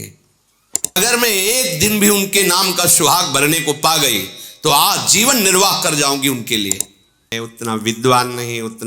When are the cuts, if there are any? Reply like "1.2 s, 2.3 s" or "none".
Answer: 1.0 s, 7.4 s